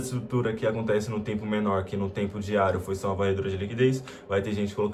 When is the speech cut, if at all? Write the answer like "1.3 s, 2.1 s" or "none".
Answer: none